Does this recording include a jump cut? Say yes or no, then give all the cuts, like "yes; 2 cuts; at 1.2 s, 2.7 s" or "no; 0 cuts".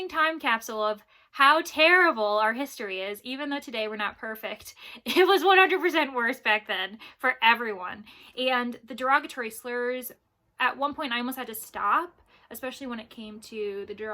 no; 0 cuts